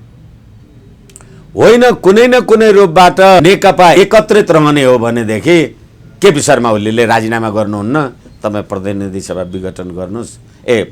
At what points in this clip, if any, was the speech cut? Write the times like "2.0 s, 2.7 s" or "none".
3.4 s